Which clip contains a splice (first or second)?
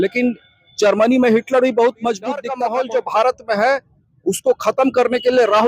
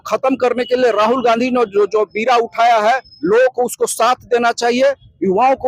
first